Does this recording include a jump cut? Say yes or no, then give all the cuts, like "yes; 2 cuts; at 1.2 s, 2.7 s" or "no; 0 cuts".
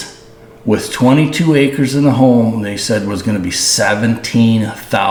no; 0 cuts